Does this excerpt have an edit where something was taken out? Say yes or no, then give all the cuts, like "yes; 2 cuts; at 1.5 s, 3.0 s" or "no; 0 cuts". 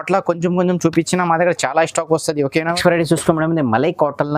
yes; 1 cut; at 2.7 s